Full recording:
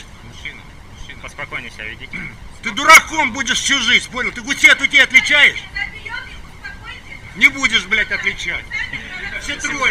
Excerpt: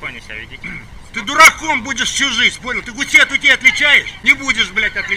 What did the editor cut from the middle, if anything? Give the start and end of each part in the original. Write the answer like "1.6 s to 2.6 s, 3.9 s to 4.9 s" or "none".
5.6 s to 7.3 s